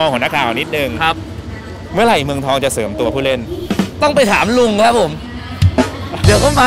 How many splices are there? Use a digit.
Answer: 0